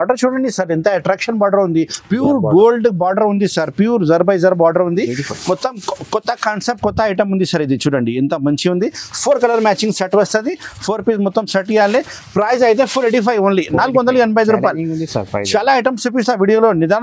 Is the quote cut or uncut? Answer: uncut